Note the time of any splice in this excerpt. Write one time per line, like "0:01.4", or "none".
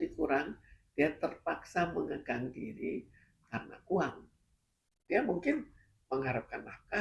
0:05.1